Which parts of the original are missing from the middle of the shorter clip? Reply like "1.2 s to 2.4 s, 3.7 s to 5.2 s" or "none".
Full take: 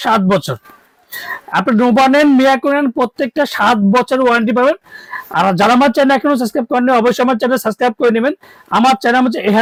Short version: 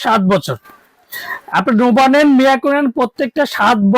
none